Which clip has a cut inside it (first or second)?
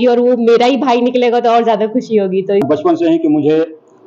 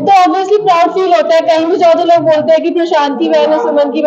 first